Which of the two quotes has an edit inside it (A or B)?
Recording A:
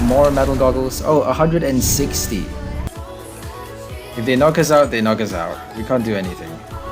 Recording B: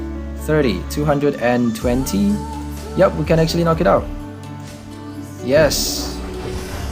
A